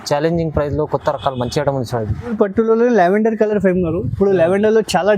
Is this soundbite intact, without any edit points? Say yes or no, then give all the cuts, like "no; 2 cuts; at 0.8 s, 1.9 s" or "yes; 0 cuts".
no; 1 cut; at 2.3 s